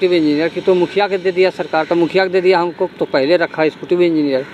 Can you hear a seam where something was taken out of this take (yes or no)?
no